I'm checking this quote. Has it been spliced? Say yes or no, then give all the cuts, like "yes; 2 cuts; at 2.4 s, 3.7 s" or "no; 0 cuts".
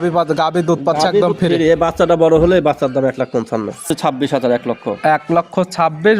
yes; 1 cut; at 3.9 s